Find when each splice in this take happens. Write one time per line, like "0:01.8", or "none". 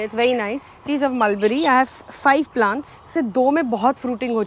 0:00.9
0:03.1